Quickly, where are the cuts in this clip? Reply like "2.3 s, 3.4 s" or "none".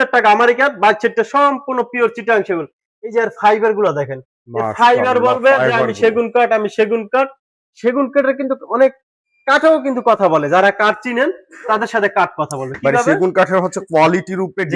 none